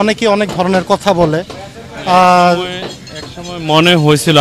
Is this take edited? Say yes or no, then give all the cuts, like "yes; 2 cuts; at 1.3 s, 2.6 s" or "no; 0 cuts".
no; 0 cuts